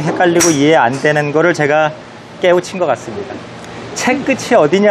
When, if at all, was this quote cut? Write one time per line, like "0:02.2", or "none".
none